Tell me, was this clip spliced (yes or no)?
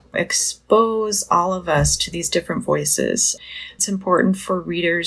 yes